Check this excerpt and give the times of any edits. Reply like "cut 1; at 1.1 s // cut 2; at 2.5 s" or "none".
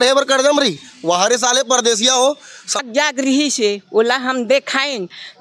cut 1; at 2.8 s